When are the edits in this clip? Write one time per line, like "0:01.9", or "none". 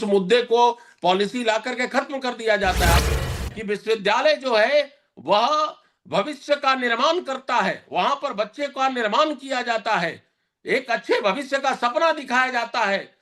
0:03.0